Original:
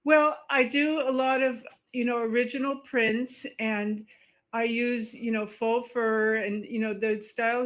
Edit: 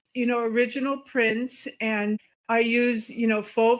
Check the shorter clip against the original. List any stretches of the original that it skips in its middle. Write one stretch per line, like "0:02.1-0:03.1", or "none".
0:04.1-0:04.4